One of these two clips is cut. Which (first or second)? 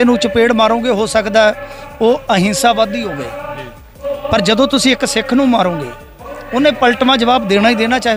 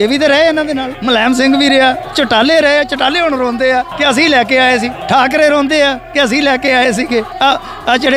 second